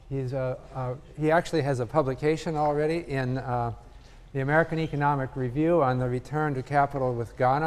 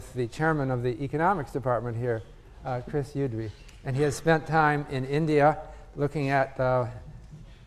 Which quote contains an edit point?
first; 1 cut; at 4.1 s

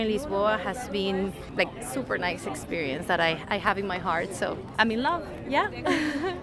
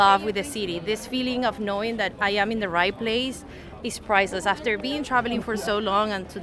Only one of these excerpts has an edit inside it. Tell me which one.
first; 2 cuts; at 1.5 s, 4.7 s

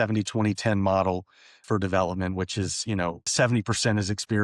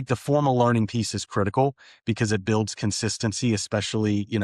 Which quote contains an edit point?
first; 1 cut; at 3.3 s

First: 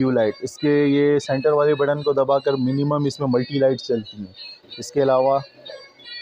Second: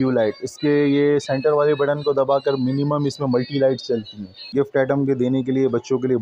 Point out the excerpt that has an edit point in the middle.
second; 1 cut; at 4.5 s

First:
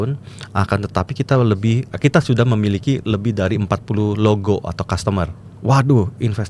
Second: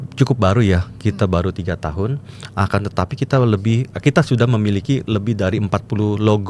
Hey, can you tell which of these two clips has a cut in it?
first; 1 cut; at 5.4 s

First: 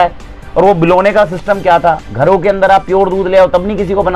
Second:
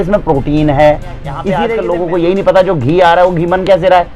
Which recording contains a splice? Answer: second; 1 cut; at 1.6 s

